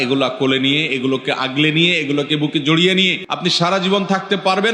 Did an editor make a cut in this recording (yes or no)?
yes